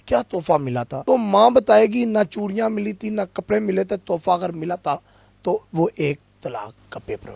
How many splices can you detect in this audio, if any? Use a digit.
1